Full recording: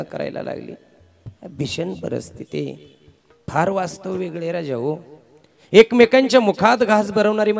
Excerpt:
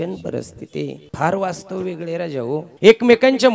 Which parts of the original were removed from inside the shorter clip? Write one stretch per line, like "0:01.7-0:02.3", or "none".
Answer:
0:02.8-0:03.4
0:05.0-0:05.6